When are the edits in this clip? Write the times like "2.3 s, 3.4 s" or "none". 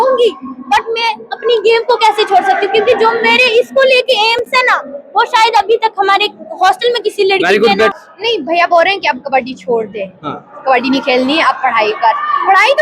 7.9 s